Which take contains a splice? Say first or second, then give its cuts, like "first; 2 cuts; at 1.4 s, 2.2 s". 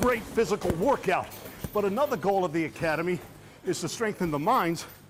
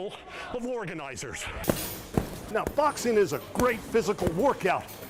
second; 1 cut; at 1.6 s